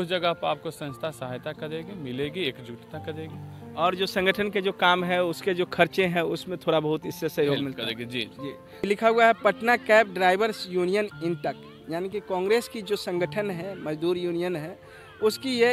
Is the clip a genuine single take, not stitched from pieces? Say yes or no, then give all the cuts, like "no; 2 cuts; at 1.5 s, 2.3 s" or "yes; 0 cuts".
no; 1 cut; at 8.9 s